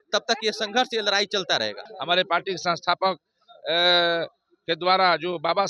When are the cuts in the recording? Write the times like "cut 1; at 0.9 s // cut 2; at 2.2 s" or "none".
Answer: cut 1; at 1.9 s